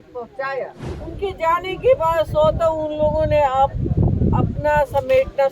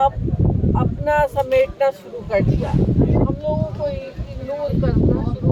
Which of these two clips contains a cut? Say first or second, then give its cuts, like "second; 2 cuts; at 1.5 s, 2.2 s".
first; 1 cut; at 1.0 s